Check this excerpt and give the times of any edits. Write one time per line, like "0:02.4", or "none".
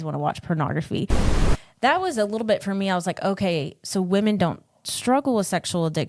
0:01.4